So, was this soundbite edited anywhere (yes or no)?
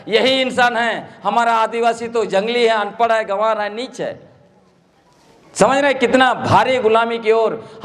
no